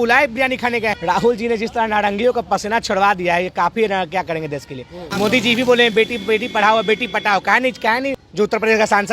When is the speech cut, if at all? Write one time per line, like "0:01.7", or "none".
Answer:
0:01.0
0:05.1
0:08.2